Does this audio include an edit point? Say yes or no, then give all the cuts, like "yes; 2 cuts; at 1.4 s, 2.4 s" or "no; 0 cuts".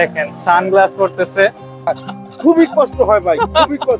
yes; 1 cut; at 1.9 s